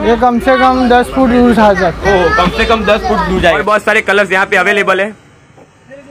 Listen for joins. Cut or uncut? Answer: cut